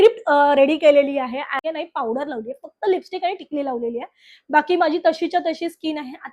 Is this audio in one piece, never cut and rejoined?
no; 1 cut; at 1.6 s

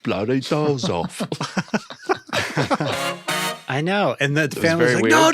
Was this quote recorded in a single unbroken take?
no; 1 cut; at 3.5 s

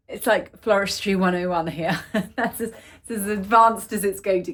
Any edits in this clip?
no; 0 cuts

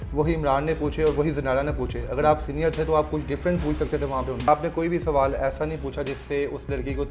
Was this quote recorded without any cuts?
no; 1 cut; at 4.5 s

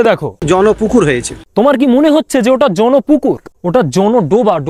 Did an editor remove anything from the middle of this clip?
no; 0 cuts

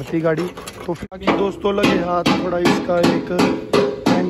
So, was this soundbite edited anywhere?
yes; 1 cut; at 1.0 s

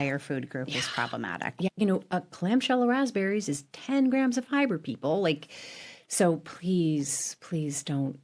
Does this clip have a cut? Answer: yes; 1 cut; at 1.7 s

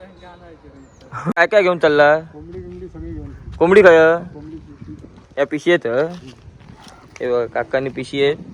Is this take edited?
yes; 1 cut; at 1.3 s

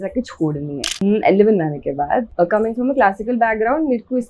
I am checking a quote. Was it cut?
yes; 2 cuts; at 1.0 s, 2.3 s

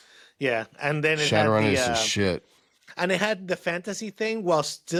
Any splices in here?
no; 0 cuts

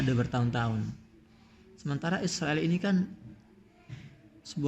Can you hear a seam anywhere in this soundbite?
no; 0 cuts

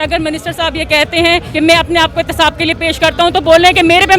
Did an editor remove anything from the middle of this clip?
yes; 1 cut; at 1.5 s

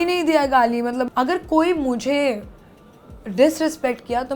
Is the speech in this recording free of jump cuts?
no; 1 cut; at 1.1 s

